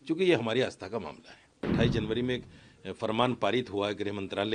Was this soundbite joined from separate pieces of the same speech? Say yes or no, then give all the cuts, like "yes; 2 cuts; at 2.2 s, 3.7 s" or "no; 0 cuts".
yes; 1 cut; at 1.6 s